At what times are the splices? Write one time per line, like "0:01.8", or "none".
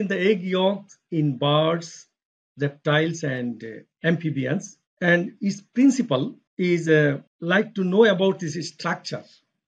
0:04.8
0:06.4
0:07.3